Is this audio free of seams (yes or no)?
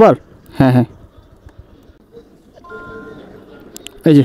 no